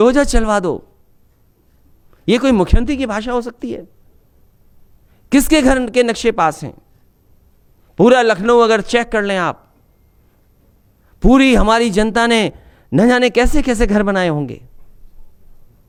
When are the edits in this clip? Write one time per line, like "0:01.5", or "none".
none